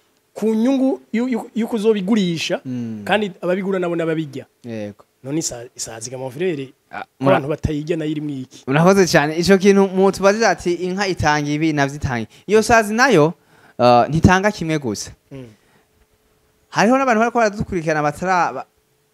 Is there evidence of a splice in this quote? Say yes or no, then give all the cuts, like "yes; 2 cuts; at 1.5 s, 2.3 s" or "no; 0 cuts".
no; 0 cuts